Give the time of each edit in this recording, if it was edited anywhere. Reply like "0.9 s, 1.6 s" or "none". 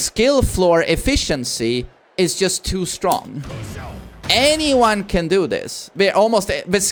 none